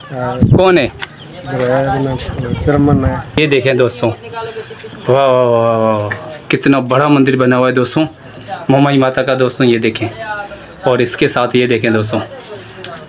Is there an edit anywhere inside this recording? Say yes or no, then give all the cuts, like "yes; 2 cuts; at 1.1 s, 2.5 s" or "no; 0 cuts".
yes; 1 cut; at 3.4 s